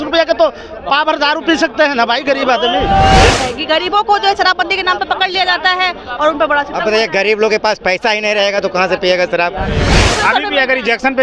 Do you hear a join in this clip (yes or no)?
yes